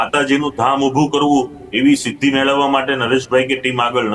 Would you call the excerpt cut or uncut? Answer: uncut